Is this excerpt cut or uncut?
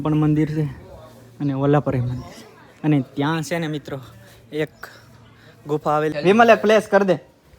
cut